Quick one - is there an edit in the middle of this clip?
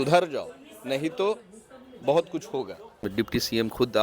yes; 1 cut; at 3.0 s

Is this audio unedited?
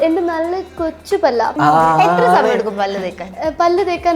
no; 1 cut; at 1.5 s

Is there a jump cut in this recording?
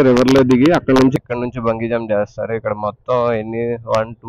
yes; 1 cut; at 1.1 s

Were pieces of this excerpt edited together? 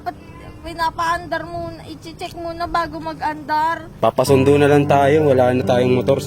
yes; 1 cut; at 3.9 s

